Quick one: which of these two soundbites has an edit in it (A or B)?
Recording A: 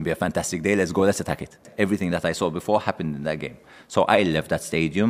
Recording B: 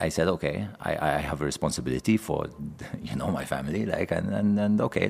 A